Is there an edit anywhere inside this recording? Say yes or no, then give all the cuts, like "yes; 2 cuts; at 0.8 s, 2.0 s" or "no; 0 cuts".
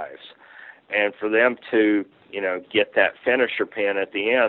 no; 0 cuts